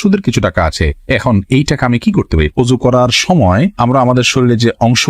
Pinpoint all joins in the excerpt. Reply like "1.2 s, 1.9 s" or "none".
2.5 s